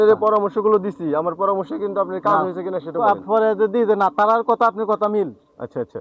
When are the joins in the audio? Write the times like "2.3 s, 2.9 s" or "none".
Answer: none